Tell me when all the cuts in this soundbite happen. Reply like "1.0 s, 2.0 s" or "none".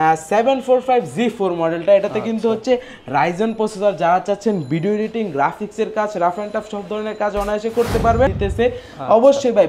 8.3 s

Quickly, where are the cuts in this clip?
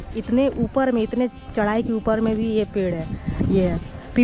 none

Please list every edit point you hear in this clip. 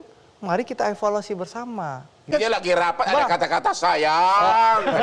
2.2 s

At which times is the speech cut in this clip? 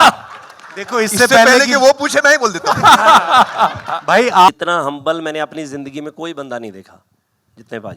4.5 s

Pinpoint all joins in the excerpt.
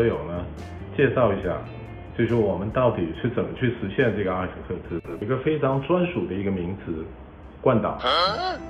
5.2 s

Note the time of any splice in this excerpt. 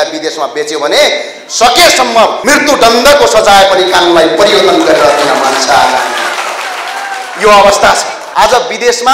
2.4 s, 8.2 s

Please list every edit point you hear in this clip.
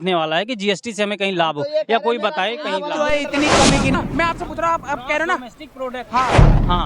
3.9 s

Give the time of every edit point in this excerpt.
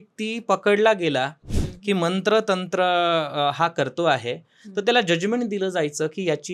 none

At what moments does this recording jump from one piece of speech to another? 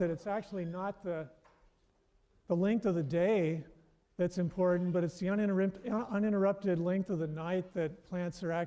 none

